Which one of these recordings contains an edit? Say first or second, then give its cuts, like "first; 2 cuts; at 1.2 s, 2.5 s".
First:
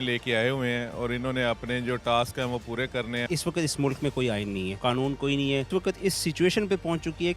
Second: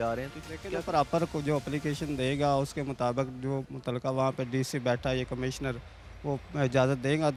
first; 3 cuts; at 3.2 s, 4.7 s, 5.7 s